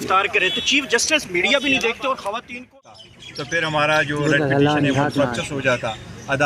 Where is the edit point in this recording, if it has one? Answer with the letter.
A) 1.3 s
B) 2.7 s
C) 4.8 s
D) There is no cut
B